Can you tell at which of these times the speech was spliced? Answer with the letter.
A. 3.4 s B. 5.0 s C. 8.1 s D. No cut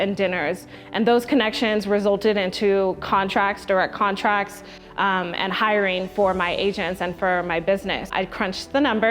C